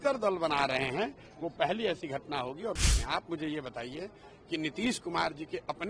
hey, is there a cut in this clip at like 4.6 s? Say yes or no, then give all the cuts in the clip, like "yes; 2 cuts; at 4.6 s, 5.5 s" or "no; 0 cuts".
no; 1 cut; at 2.8 s